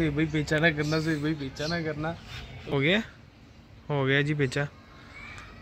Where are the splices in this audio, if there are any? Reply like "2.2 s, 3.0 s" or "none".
2.7 s